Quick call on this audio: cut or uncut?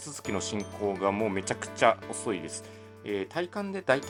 uncut